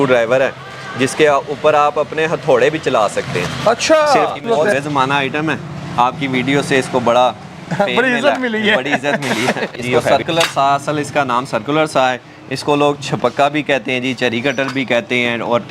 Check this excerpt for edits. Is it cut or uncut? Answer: cut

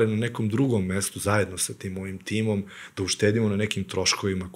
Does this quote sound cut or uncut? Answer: uncut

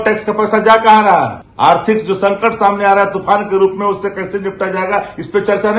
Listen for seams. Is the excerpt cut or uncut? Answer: cut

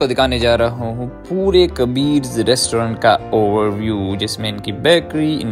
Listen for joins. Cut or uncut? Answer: uncut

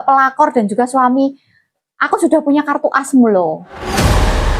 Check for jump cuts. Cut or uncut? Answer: cut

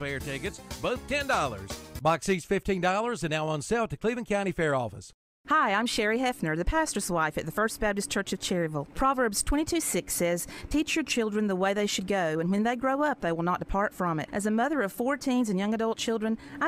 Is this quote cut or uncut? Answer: uncut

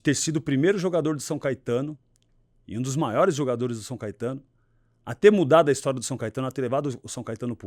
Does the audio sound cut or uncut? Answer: uncut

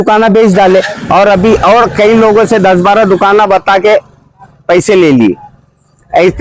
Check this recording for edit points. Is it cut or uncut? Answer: uncut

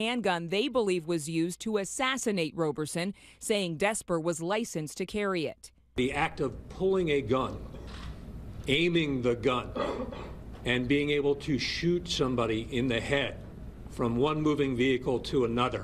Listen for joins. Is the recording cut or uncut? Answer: cut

